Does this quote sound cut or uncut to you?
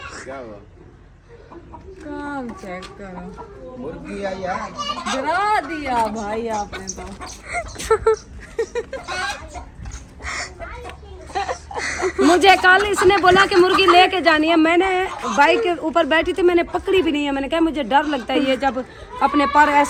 uncut